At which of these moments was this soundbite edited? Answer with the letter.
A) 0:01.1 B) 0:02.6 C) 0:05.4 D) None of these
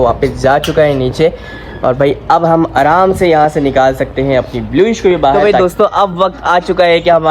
C